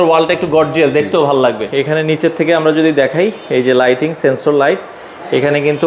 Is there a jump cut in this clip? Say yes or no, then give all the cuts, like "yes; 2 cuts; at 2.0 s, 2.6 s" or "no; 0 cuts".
yes; 1 cut; at 1.6 s